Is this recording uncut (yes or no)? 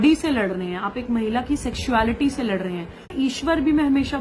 no